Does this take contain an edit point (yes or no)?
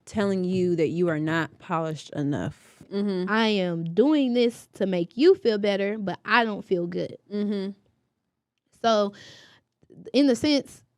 yes